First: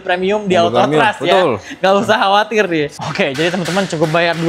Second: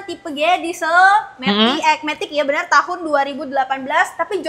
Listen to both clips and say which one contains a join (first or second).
first